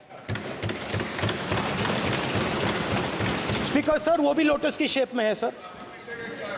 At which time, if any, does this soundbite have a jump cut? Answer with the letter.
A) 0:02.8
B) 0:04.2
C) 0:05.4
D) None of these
D